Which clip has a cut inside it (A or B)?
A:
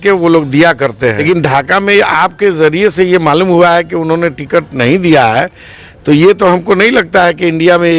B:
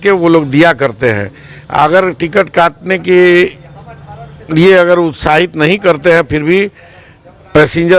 A